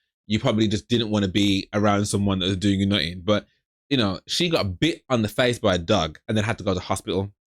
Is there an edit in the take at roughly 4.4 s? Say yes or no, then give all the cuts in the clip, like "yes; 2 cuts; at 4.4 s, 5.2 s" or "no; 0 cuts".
no; 1 cut; at 6.2 s